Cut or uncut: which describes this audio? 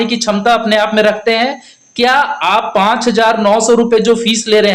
uncut